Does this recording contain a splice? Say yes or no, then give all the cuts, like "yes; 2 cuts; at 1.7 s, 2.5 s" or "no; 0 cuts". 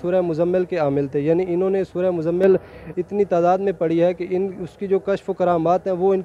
no; 0 cuts